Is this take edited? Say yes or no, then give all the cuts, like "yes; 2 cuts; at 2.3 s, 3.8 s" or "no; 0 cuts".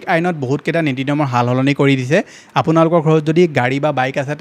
no; 0 cuts